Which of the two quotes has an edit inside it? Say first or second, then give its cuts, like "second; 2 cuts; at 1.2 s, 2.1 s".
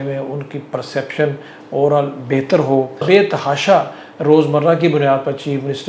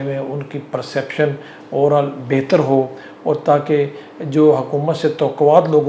first; 1 cut; at 3.0 s